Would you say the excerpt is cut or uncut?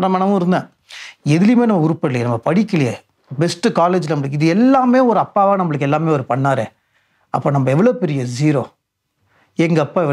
uncut